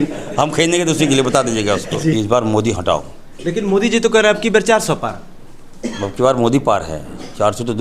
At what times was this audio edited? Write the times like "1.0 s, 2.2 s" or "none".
2.1 s